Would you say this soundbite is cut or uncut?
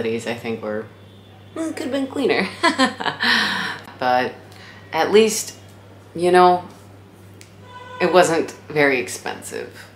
uncut